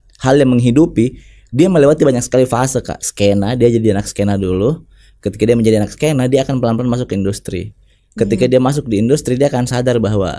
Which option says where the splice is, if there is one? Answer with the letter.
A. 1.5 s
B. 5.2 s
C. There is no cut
C